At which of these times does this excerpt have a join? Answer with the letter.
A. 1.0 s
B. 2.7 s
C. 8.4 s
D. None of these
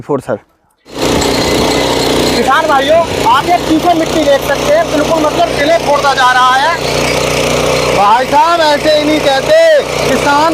A